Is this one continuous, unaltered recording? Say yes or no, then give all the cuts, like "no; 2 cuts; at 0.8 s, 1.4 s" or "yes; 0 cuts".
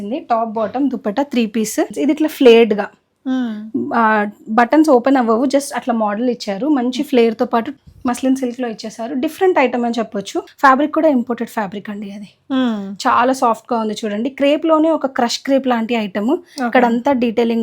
no; 3 cuts; at 1.9 s, 7.7 s, 10.4 s